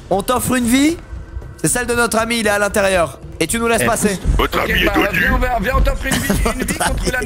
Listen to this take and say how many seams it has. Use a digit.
1